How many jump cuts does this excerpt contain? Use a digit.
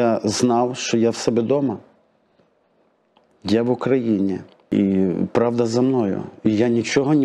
1